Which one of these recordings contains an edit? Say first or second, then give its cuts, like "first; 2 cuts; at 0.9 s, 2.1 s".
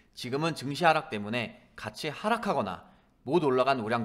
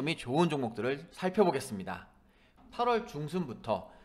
second; 1 cut; at 2.5 s